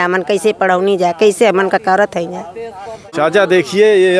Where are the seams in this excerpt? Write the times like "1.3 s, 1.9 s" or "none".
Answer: 3.1 s